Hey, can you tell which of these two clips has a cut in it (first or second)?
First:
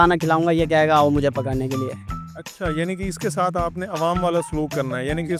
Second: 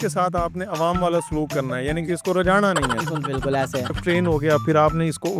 second